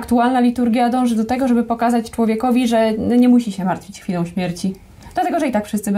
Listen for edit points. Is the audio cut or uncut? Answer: uncut